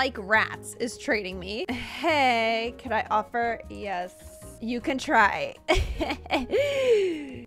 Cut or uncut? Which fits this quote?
uncut